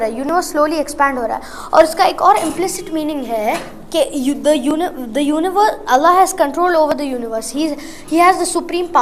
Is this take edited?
no; 0 cuts

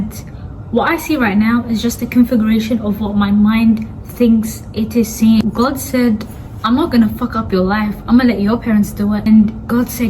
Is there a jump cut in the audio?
yes; 2 cuts; at 5.4 s, 9.2 s

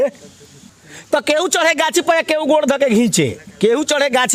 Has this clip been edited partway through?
no; 0 cuts

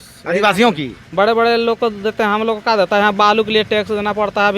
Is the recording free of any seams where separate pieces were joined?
yes; 0 cuts

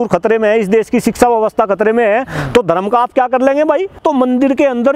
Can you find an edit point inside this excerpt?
yes; 1 cut; at 4.0 s

